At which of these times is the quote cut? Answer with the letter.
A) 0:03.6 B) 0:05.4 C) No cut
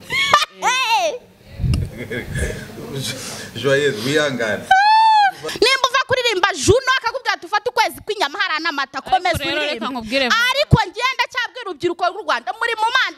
B